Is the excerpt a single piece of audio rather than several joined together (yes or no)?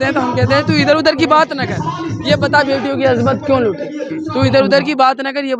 yes